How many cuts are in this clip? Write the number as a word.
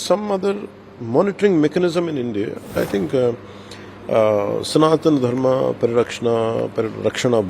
one